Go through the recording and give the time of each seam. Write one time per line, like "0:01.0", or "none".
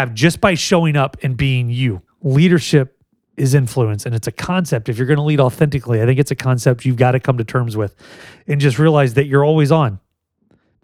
0:02.1